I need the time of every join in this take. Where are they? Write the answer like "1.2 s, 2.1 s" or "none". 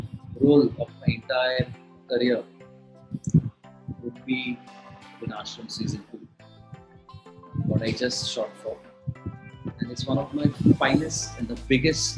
none